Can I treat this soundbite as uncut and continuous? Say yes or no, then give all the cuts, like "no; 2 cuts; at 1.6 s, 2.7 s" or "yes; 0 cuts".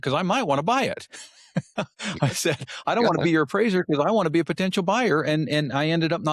yes; 0 cuts